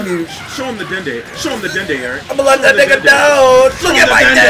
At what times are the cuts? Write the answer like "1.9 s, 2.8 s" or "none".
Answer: none